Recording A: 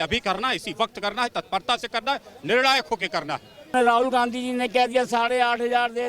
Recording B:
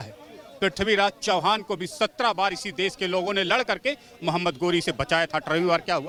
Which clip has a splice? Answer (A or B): A